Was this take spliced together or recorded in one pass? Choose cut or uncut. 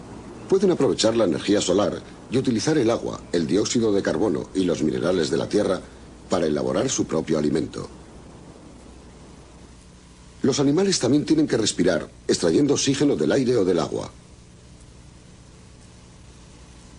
uncut